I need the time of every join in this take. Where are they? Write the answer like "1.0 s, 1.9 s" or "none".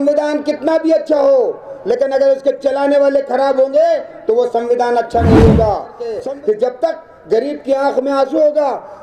6.2 s